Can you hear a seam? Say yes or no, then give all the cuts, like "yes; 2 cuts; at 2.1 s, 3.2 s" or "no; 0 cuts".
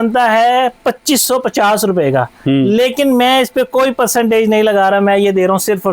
no; 0 cuts